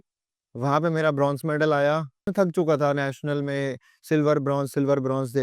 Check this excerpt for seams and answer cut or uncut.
cut